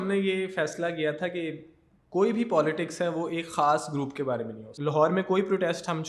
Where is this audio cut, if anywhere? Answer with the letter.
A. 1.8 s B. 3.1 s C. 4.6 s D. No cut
C